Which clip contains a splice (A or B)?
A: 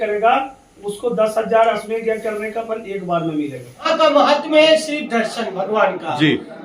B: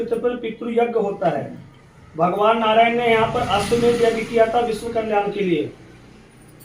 A